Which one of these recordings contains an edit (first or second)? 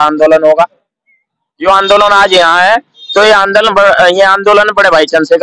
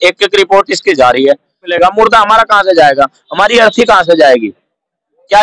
second